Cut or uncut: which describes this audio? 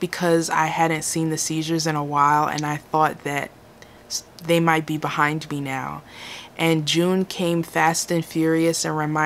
uncut